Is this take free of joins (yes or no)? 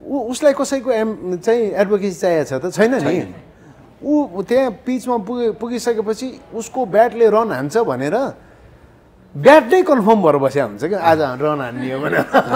yes